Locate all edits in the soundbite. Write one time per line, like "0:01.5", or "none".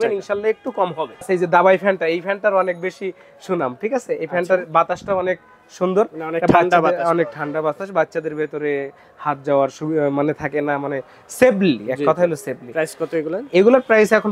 0:01.2